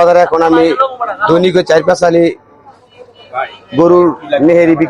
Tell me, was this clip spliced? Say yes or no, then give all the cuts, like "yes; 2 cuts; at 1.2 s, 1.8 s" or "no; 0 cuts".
no; 0 cuts